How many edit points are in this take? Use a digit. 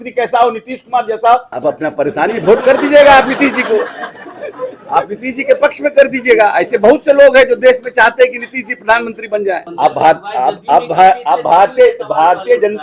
2